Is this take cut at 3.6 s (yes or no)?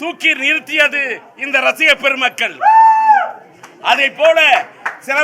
no